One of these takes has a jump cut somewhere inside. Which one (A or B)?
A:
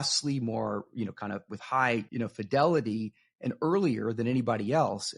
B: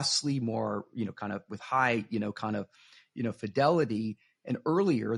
A